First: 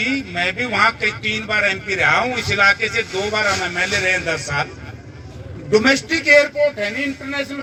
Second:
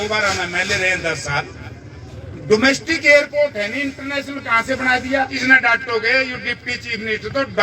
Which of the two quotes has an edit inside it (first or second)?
second